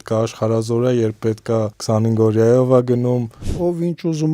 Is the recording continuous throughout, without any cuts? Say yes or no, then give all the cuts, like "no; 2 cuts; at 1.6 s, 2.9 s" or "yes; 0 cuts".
no; 2 cuts; at 1.8 s, 3.5 s